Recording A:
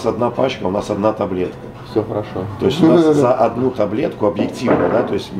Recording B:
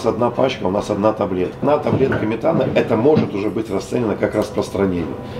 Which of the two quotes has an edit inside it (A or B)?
B